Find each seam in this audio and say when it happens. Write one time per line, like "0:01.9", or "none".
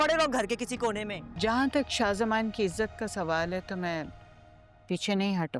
0:01.2